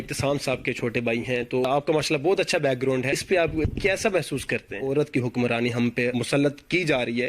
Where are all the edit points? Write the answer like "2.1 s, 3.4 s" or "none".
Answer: 1.6 s, 3.5 s, 4.8 s, 6.1 s